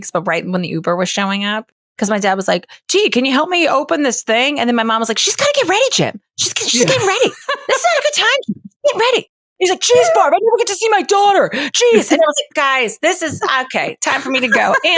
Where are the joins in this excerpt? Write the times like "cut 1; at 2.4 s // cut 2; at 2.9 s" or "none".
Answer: cut 1; at 1.7 s